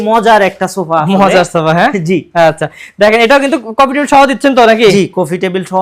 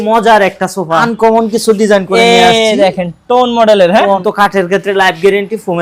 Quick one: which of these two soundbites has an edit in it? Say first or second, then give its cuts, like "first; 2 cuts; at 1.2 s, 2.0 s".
second; 2 cuts; at 1.0 s, 4.2 s